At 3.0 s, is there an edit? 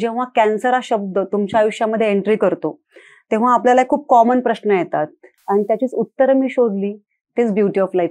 no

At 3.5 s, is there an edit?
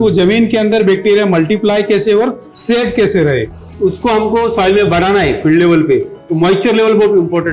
yes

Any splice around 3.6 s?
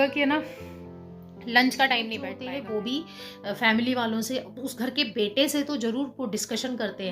no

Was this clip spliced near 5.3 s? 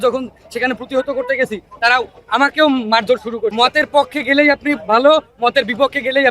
no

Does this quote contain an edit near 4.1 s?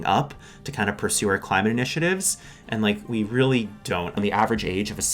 yes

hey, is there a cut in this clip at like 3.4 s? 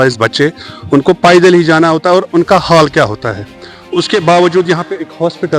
no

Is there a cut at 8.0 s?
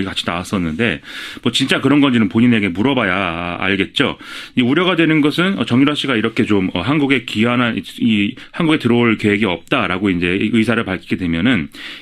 yes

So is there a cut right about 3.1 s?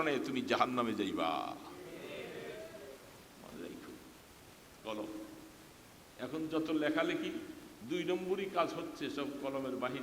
no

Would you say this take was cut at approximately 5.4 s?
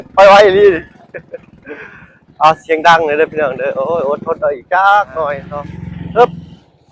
yes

